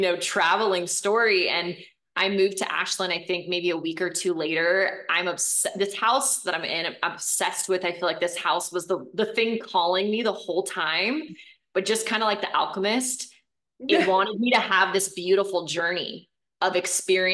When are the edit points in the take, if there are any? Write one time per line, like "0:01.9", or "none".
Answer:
none